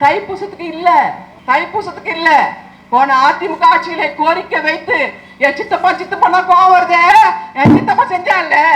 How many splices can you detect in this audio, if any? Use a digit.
1